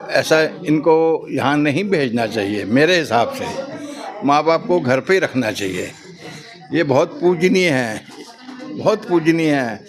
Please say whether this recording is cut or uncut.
uncut